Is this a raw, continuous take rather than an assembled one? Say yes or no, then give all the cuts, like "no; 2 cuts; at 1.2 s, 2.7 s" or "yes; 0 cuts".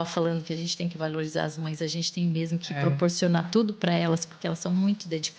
yes; 0 cuts